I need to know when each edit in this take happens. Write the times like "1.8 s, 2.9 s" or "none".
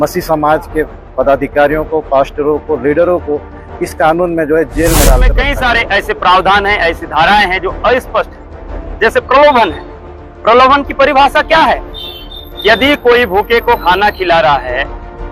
5.3 s